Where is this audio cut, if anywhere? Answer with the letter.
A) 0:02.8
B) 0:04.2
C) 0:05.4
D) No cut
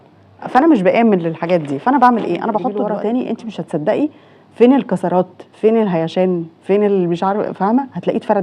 A